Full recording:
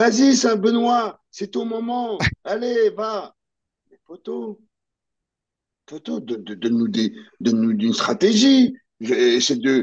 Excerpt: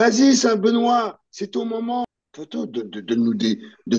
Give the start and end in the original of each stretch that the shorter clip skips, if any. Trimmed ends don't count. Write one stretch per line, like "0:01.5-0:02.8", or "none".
0:02.1-0:05.6